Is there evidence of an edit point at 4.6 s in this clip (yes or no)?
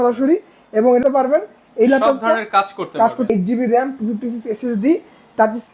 no